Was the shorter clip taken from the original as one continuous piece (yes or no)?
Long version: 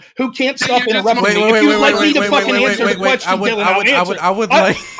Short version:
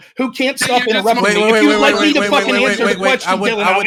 yes